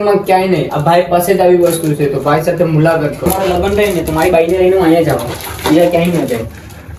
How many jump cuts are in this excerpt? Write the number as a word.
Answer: one